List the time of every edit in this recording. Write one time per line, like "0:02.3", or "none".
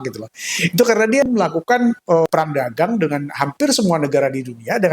0:01.2
0:02.3

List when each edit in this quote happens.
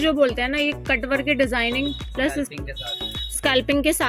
none

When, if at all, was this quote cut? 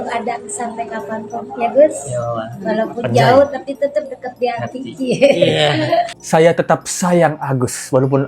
none

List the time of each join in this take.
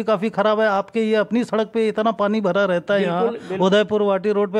none

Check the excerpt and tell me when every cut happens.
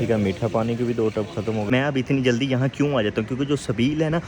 0:01.7

